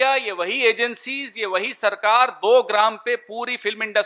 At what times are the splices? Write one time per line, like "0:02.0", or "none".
none